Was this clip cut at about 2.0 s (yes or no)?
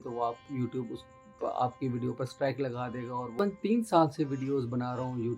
no